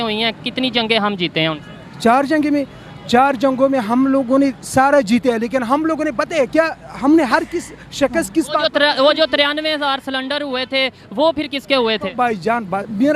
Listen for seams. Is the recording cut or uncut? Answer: uncut